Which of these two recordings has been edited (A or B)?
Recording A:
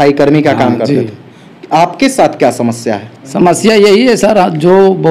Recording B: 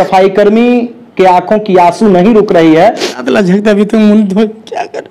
B